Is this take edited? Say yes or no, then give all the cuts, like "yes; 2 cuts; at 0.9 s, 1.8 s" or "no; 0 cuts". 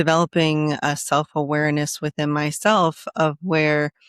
no; 0 cuts